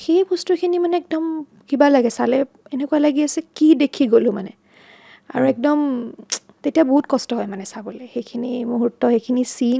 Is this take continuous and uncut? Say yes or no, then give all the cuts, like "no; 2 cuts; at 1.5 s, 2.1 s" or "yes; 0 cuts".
yes; 0 cuts